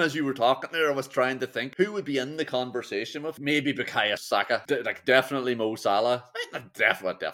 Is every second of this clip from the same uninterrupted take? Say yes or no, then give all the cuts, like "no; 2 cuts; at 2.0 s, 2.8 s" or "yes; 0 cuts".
no; 3 cuts; at 1.6 s, 3.4 s, 4.2 s